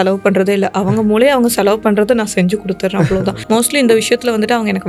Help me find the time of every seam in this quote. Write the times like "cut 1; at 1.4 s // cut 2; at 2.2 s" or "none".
none